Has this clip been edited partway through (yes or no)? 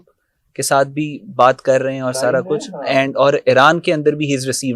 no